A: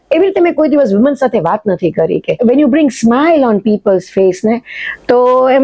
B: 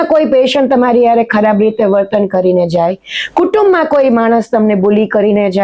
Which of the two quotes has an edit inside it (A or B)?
A